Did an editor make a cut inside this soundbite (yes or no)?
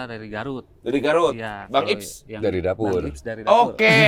no